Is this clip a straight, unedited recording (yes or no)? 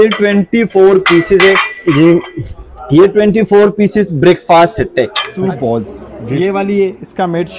no